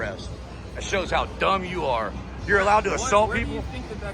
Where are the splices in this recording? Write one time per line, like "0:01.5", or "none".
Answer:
none